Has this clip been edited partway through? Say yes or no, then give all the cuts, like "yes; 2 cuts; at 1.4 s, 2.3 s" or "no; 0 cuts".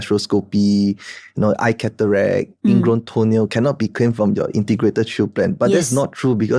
no; 0 cuts